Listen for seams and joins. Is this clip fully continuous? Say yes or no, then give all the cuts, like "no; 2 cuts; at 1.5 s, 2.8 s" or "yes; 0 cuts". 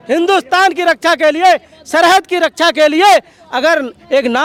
yes; 0 cuts